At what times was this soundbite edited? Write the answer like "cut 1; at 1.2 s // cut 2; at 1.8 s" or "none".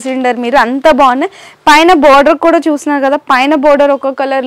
none

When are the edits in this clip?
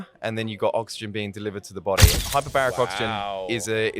cut 1; at 2.1 s

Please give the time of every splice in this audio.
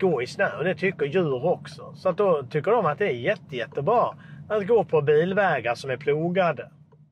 none

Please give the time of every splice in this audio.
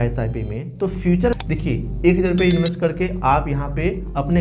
cut 1; at 1.3 s

